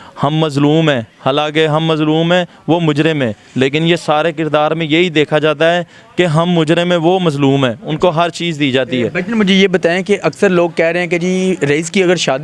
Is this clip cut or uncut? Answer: uncut